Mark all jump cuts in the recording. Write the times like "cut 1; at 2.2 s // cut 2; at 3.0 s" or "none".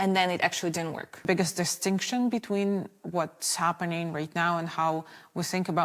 cut 1; at 1.3 s